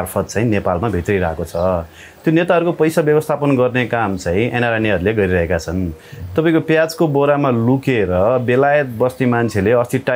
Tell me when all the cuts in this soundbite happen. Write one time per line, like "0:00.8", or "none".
none